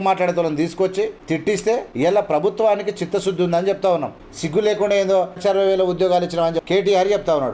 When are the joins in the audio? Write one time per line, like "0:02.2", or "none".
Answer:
0:01.4
0:04.3
0:05.4
0:06.6